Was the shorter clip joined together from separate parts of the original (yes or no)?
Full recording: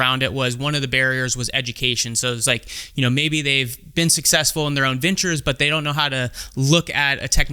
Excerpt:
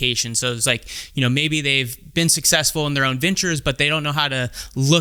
no